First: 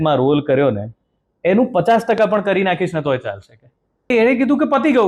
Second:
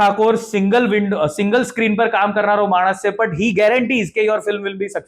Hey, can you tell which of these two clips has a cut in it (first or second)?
first